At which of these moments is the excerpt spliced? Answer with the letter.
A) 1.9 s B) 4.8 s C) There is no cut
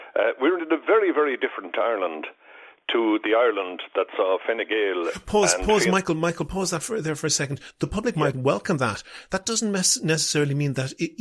C